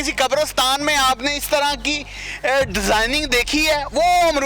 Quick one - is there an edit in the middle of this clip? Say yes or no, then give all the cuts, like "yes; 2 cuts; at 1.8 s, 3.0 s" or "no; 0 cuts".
no; 0 cuts